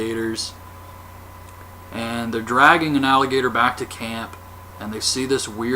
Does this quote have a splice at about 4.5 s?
no; 1 cut; at 2.8 s

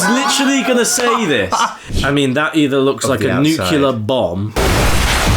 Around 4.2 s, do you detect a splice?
no; 1 cut; at 1.9 s

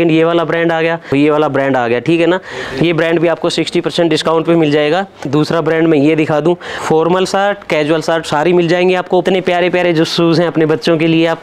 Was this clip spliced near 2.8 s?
no; 4 cuts; at 1.1 s, 5.3 s, 6.8 s, 9.2 s

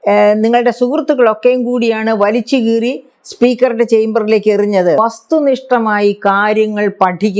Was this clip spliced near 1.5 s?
no; 1 cut; at 5.0 s

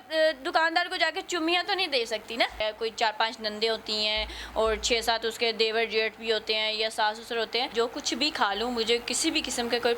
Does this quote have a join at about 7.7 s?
yes; 2 cuts; at 2.6 s, 7.7 s

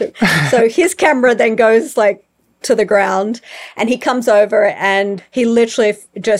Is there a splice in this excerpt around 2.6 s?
no; 1 cut; at 5.2 s

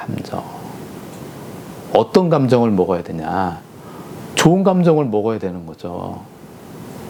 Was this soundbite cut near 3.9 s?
no; 0 cuts

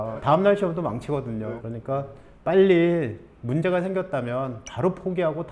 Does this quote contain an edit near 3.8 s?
no; 1 cut; at 1.6 s

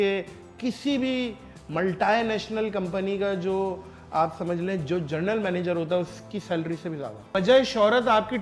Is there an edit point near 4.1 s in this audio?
no; 1 cut; at 7.3 s

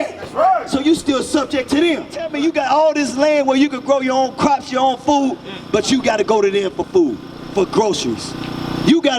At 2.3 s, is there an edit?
yes; 1 cut; at 2.3 s

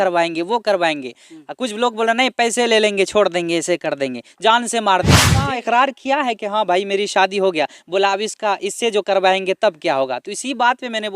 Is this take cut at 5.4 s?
yes; 1 cut; at 5.4 s

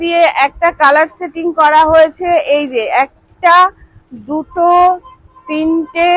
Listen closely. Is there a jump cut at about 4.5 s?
no; 0 cuts

